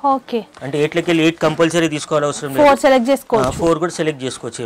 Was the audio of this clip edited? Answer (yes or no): no